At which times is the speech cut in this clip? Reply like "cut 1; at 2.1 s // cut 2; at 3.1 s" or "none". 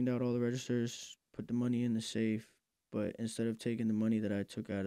none